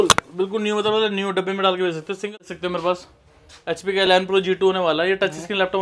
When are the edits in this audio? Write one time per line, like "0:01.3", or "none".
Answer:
0:02.4